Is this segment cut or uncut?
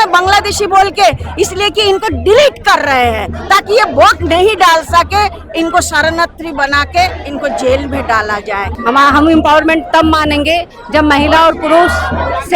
cut